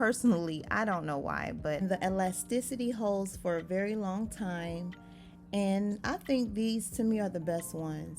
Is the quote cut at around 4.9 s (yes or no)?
no